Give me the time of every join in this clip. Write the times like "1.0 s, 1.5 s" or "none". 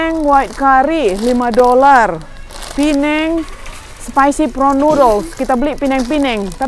none

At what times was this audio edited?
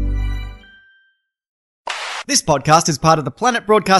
1.5 s

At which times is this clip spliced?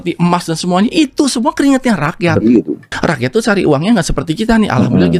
none

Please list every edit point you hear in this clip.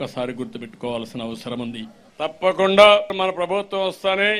2.0 s, 3.1 s

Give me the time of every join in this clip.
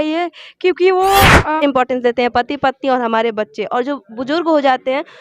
1.6 s

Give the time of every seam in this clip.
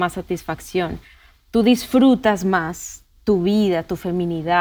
none

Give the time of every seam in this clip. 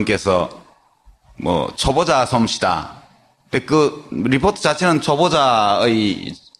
4.6 s

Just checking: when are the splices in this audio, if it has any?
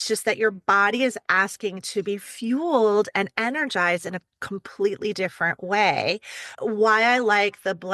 6.5 s

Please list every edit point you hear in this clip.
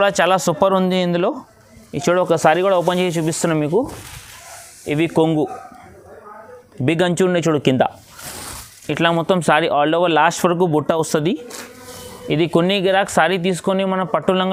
none

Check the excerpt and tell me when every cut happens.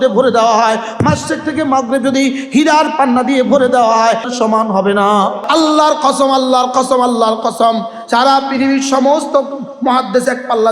4.3 s, 5.4 s

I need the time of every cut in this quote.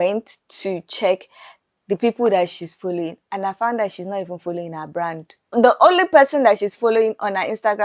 5.3 s

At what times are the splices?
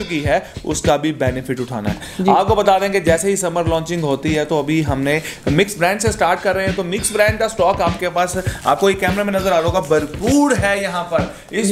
2.0 s

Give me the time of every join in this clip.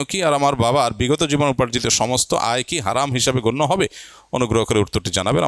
none

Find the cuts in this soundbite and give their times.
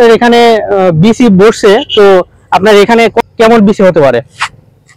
3.2 s

